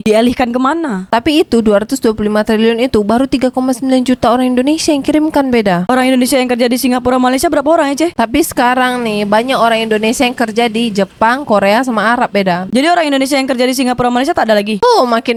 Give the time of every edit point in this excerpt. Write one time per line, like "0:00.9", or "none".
none